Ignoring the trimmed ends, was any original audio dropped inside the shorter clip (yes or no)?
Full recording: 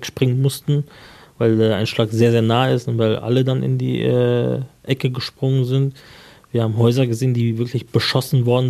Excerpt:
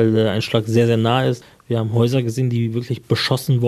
yes